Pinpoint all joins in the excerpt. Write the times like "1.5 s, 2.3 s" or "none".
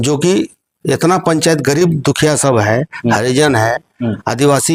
none

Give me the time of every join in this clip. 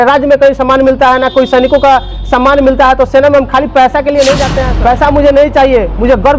4.6 s

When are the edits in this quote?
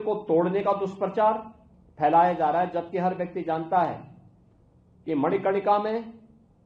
none

